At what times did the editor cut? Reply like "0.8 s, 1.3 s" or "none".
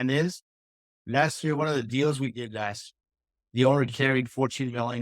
1.0 s